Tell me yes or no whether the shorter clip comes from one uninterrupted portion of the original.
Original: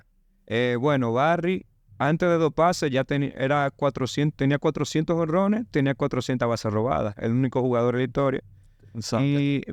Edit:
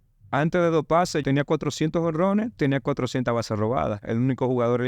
no